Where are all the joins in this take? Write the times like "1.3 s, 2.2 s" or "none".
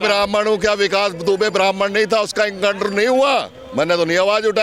none